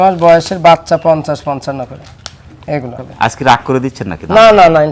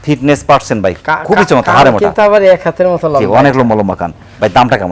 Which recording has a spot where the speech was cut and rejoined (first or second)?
first